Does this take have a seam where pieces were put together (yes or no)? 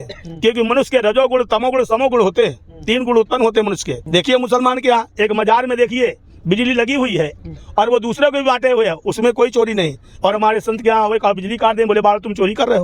yes